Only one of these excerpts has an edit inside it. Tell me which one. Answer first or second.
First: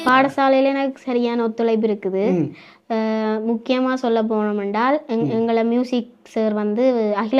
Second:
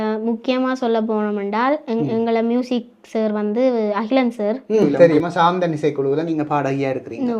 second